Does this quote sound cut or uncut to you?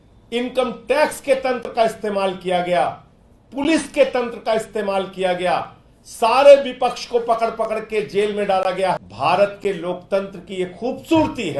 cut